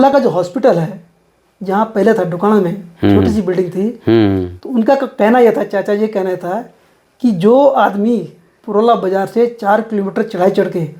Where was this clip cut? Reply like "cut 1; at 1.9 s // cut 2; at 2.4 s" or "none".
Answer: none